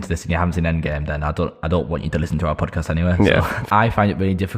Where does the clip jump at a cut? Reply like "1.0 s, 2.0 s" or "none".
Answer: 3.6 s